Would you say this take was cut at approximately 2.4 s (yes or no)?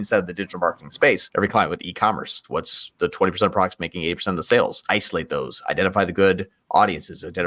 yes